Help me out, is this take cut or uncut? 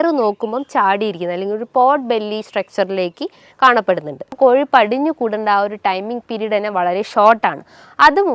cut